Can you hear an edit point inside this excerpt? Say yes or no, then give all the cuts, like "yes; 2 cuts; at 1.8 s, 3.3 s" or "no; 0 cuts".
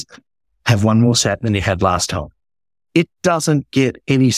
no; 0 cuts